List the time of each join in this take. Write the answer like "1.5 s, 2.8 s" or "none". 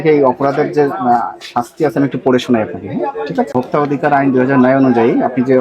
3.5 s